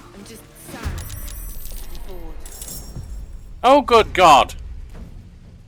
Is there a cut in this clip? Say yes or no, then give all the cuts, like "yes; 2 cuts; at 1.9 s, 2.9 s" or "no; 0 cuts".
no; 0 cuts